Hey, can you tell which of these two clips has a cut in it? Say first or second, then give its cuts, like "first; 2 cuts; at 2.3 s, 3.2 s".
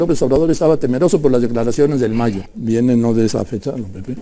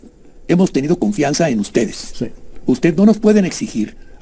first; 1 cut; at 2.5 s